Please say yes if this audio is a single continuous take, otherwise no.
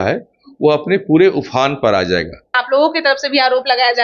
no